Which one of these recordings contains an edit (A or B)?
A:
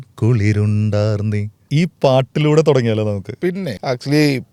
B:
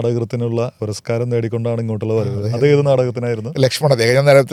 A